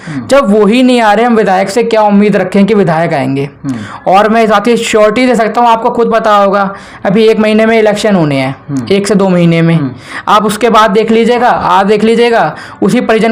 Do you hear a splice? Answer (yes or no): no